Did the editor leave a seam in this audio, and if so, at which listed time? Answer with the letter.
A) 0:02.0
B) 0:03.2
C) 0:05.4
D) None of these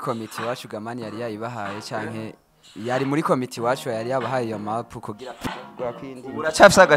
C